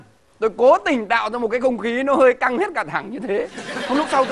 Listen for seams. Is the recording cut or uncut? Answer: uncut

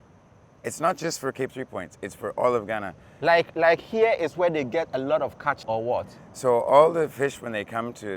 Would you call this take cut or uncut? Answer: uncut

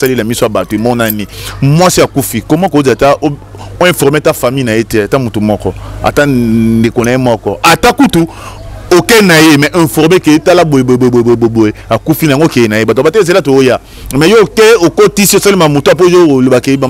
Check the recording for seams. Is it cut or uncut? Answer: cut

